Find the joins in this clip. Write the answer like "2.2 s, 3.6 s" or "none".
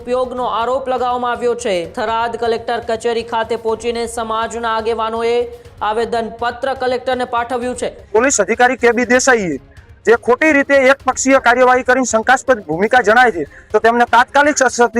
1.9 s, 8.0 s

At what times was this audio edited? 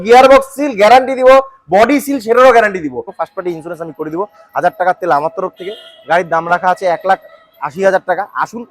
3.1 s

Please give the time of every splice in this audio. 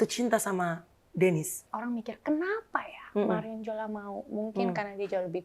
1.7 s

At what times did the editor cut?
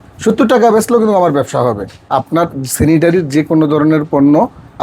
1.9 s

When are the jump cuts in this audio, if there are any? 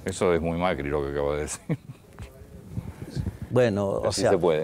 none

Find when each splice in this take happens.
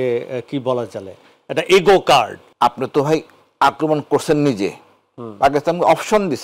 2.4 s

